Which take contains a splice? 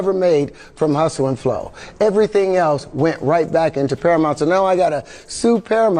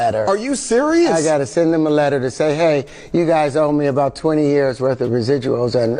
second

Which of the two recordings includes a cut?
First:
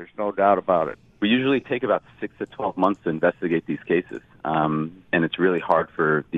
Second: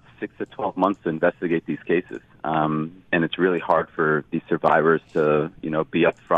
first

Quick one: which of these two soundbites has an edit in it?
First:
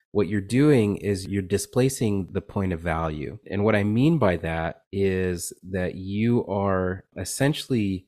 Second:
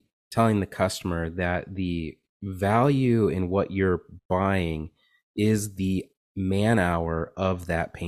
first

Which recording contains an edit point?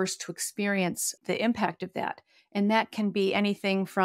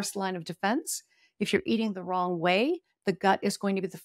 first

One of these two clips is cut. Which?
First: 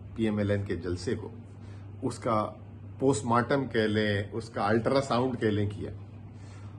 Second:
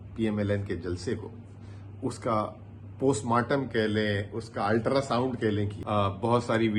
second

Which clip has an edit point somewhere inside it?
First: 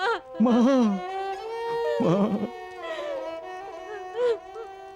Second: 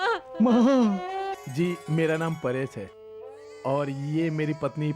second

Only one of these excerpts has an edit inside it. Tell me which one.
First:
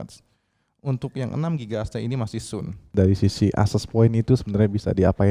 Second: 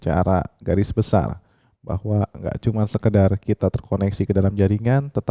first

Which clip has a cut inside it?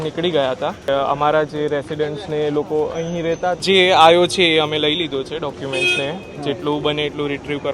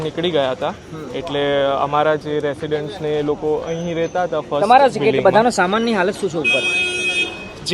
first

